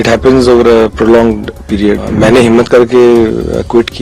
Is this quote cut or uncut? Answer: cut